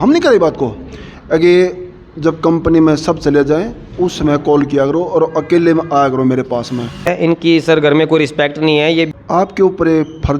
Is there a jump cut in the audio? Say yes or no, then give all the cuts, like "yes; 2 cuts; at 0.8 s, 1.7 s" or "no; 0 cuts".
yes; 2 cuts; at 7.1 s, 9.1 s